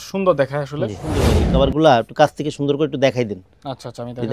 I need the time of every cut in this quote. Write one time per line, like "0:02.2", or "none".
0:01.4